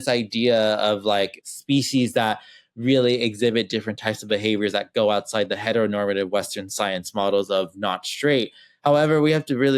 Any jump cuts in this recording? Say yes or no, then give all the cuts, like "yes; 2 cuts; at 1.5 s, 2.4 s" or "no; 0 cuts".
yes; 1 cut; at 1.4 s